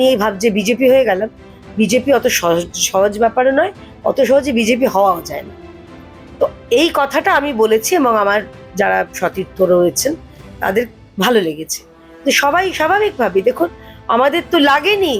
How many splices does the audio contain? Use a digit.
0